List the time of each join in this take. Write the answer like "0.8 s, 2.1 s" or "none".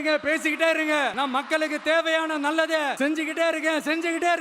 1.1 s, 2.9 s